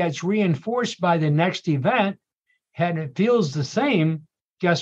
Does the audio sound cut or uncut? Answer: uncut